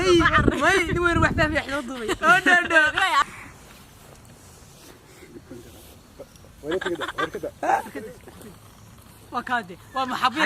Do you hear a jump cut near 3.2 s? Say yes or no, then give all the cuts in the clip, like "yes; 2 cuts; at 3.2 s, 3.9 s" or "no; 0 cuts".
yes; 1 cut; at 3.2 s